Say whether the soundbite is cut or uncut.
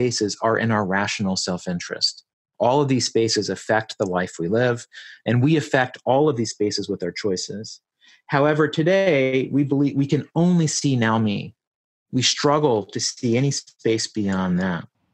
cut